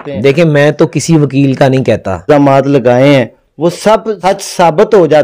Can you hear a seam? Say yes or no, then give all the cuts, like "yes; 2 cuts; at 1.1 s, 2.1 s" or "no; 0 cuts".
yes; 2 cuts; at 2.2 s, 4.1 s